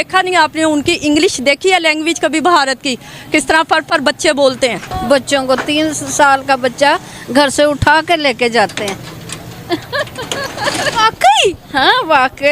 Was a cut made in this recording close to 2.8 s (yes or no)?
no